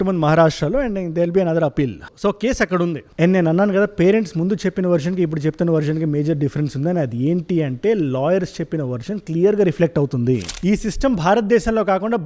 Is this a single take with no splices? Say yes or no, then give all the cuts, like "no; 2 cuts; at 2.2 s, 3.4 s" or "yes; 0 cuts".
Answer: no; 1 cut; at 10.5 s